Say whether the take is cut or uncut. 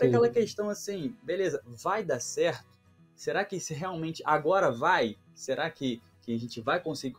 uncut